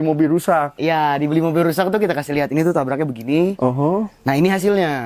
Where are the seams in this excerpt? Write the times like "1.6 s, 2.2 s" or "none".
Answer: none